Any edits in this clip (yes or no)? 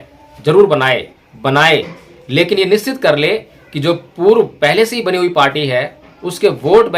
yes